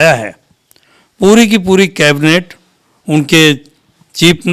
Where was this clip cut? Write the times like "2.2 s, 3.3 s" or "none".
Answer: none

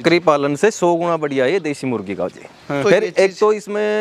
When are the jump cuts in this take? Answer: none

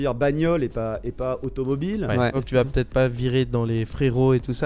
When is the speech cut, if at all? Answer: 2.4 s

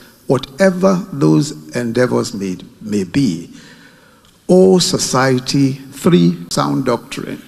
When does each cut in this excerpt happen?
6.5 s

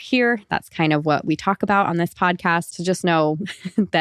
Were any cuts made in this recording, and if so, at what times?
2.7 s

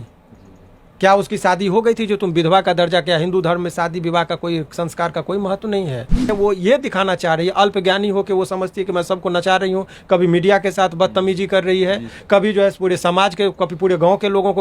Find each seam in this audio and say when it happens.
6.3 s

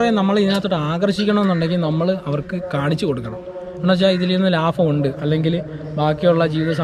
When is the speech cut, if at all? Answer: none

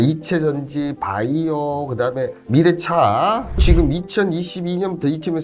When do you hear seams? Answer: 3.6 s

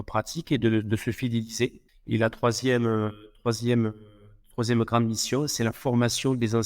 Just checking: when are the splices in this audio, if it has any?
1.9 s

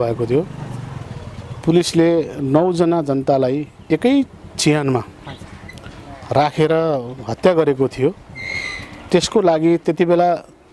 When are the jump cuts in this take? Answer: none

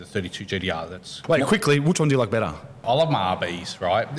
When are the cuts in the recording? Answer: 1.2 s, 2.8 s

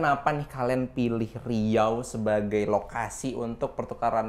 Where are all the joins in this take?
none

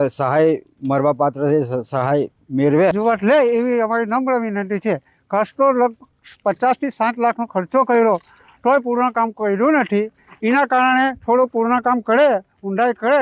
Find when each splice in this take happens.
none

